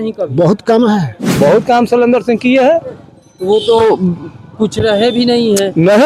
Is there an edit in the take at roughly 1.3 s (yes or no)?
yes